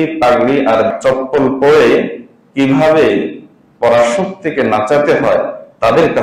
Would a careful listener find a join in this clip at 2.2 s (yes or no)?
no